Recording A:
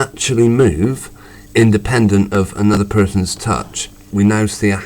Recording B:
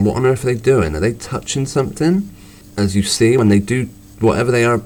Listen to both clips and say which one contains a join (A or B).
A